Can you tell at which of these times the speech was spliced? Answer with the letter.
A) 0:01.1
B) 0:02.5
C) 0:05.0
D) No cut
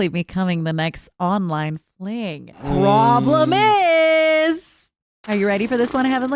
B